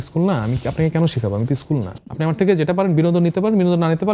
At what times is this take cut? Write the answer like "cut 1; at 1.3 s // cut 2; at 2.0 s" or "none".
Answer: cut 1; at 2.1 s